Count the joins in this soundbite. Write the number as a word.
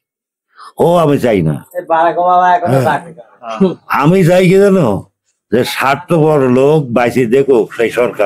zero